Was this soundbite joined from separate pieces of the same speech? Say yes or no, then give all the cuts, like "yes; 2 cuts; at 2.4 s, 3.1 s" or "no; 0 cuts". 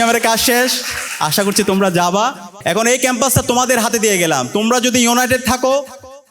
yes; 1 cut; at 2.5 s